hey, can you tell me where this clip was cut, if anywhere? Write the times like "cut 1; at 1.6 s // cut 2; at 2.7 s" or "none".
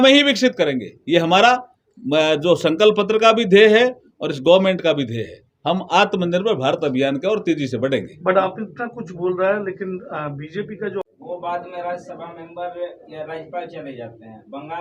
cut 1; at 11.1 s